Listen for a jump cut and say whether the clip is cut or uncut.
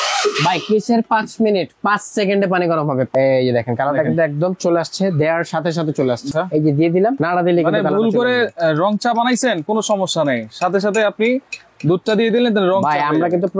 cut